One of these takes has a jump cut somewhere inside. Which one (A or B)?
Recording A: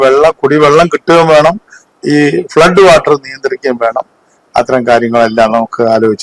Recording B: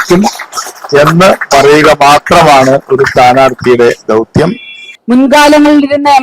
B